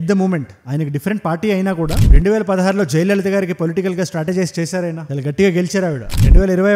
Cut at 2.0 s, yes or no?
yes